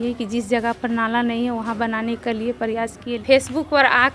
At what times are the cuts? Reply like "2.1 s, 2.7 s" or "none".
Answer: 3.1 s